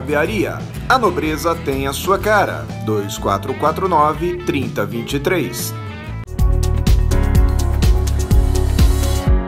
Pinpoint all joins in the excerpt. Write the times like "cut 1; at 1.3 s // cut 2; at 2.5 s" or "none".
cut 1; at 6.2 s

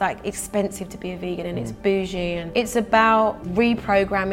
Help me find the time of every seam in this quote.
cut 1; at 2.4 s // cut 2; at 3.4 s

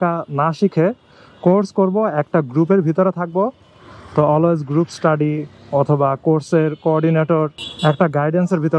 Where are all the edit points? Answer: none

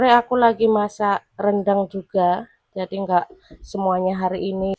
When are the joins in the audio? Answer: none

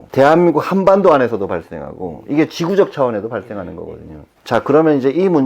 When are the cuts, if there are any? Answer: none

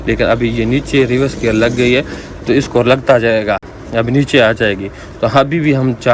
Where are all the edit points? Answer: none

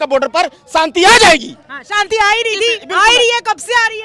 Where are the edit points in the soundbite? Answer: none

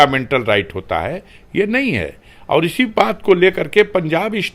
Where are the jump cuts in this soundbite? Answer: none

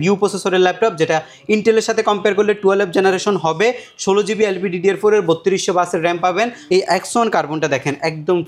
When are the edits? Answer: cut 1; at 6.6 s

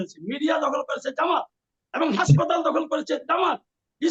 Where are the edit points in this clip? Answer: none

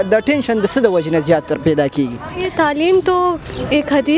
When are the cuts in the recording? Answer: cut 1; at 2.5 s

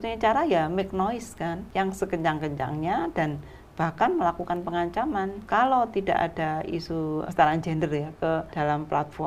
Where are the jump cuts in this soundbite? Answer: cut 1; at 1.6 s // cut 2; at 5.4 s // cut 3; at 7.3 s // cut 4; at 8.5 s

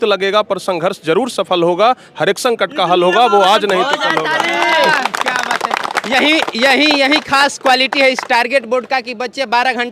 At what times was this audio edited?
none

